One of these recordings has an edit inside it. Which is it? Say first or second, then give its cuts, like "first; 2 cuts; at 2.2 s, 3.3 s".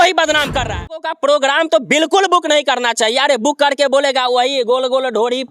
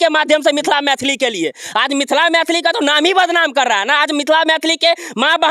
first; 1 cut; at 1.1 s